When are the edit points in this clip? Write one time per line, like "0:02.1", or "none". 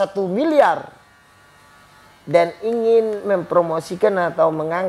none